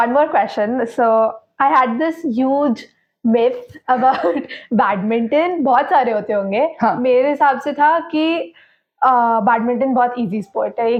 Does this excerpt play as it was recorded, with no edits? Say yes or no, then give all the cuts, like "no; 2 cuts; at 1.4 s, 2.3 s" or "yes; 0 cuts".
yes; 0 cuts